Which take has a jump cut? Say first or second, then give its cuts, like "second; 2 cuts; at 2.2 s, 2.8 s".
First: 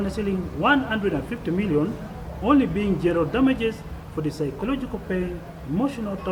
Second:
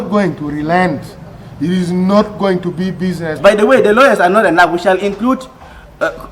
second; 1 cut; at 3.4 s